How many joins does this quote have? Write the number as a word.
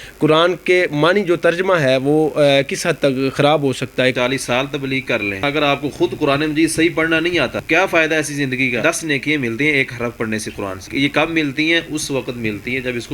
five